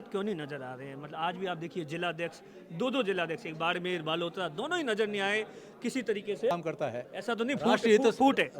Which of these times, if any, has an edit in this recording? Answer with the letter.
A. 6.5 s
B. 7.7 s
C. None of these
A